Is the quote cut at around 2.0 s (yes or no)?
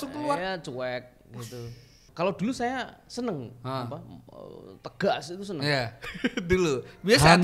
yes